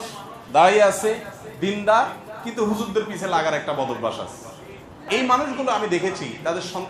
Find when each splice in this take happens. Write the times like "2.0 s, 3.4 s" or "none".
4.9 s